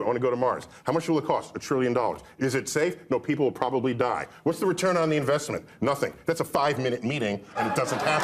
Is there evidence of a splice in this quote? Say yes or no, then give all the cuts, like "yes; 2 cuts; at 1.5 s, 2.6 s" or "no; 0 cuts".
no; 0 cuts